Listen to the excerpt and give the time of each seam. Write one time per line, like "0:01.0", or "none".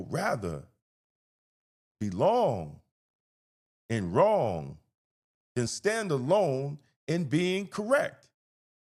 none